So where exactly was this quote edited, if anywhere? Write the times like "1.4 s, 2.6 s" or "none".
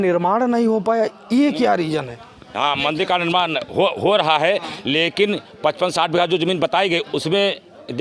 none